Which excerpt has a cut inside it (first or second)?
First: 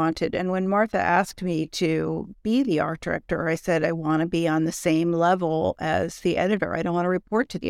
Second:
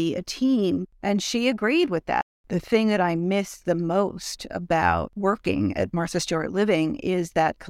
second